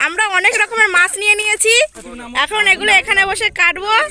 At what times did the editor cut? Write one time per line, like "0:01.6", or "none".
0:02.5